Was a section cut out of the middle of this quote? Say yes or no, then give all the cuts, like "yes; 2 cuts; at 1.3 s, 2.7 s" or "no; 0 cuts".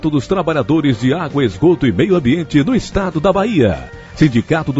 no; 0 cuts